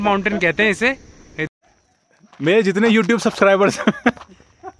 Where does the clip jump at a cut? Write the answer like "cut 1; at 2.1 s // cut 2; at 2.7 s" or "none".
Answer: cut 1; at 1.5 s